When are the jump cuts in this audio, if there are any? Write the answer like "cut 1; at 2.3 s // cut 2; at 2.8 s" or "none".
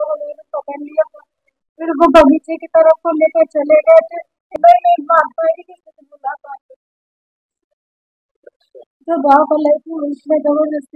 cut 1; at 4.5 s // cut 2; at 9.0 s